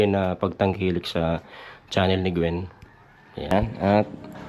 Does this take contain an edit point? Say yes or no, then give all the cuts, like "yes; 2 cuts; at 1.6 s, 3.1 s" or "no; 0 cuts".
yes; 1 cut; at 3.5 s